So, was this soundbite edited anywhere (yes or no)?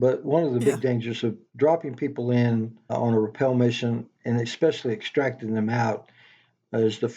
yes